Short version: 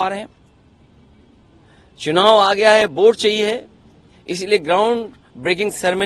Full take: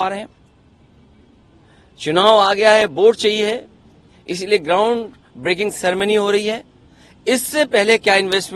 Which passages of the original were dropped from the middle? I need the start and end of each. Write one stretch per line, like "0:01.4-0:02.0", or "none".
none